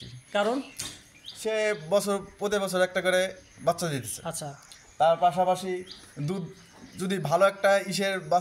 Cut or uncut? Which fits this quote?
uncut